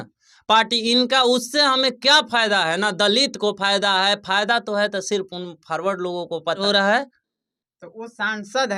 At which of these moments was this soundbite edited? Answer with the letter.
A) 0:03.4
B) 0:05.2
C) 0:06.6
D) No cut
C